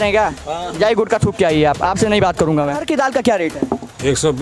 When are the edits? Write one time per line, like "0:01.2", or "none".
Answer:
0:02.8